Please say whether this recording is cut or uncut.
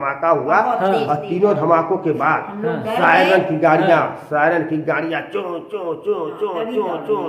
uncut